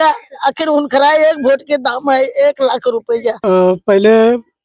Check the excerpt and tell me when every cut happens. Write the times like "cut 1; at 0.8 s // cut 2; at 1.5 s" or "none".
cut 1; at 3.3 s